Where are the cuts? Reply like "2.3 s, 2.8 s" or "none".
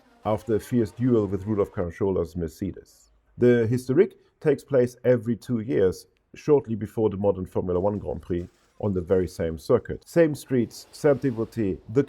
10.0 s